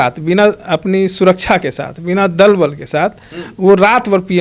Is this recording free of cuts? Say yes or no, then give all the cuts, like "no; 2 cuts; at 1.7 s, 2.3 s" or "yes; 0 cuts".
yes; 0 cuts